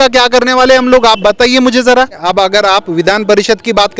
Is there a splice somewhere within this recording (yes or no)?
yes